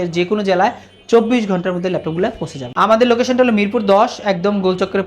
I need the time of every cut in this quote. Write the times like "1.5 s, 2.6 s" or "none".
2.6 s